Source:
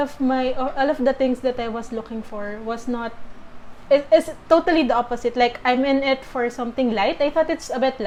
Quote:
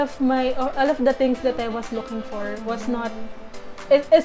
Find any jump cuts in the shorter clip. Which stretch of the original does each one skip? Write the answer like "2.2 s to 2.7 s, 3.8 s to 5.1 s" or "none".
none